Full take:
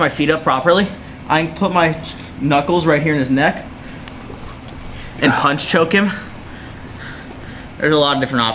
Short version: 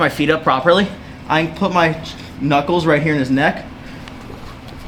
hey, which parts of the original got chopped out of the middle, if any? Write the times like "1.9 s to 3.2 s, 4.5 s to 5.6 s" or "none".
none